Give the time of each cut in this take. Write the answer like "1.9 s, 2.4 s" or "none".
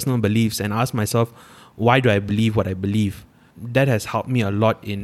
3.4 s